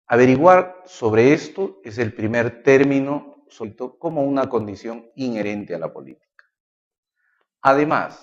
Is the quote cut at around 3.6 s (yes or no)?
no